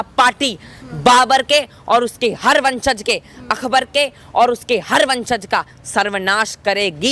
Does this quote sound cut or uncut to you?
uncut